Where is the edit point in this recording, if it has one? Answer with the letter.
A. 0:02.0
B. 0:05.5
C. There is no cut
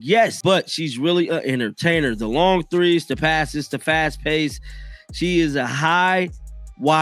C